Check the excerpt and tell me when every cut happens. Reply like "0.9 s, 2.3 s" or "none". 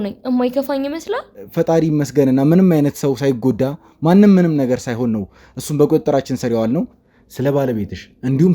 1.4 s, 7.0 s